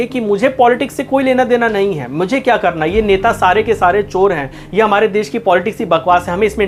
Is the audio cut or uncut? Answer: uncut